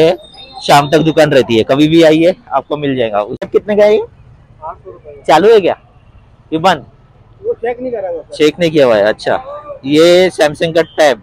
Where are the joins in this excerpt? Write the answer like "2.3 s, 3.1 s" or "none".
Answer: 3.5 s